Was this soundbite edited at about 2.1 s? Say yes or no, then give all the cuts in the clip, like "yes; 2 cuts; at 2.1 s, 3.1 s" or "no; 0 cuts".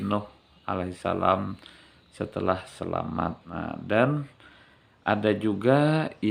no; 1 cut; at 3.5 s